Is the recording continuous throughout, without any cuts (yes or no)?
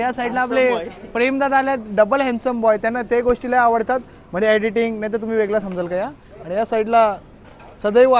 yes